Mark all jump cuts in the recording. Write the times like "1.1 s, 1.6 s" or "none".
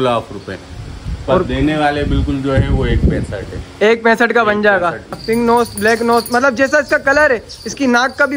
5.2 s